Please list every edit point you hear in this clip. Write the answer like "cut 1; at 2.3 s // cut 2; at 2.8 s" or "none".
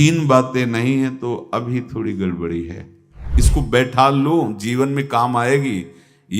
cut 1; at 3.4 s